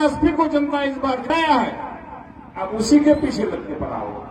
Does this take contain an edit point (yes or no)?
yes